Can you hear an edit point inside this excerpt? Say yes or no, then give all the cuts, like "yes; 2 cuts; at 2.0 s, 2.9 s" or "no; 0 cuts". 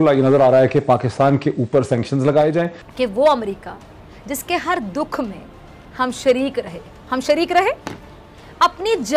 yes; 1 cut; at 2.8 s